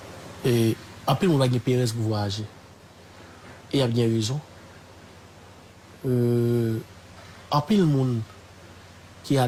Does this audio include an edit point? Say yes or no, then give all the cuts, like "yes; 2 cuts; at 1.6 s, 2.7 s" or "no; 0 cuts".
no; 0 cuts